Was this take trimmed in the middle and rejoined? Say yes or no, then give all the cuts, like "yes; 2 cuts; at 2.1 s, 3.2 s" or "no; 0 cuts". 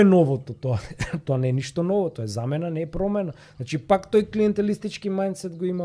no; 0 cuts